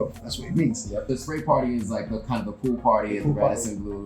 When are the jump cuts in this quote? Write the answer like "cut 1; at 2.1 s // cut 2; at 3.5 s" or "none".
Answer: cut 1; at 1.1 s